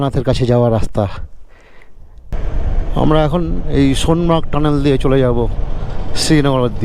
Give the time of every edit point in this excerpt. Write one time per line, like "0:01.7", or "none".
0:02.4